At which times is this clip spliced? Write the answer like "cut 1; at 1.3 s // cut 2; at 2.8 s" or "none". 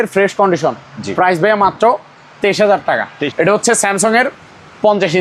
cut 1; at 3.2 s